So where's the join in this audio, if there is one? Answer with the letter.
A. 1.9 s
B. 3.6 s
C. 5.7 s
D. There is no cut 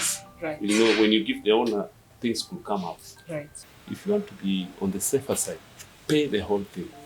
B